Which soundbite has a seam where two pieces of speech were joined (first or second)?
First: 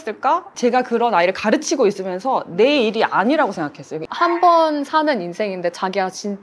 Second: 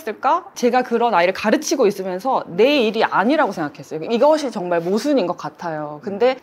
first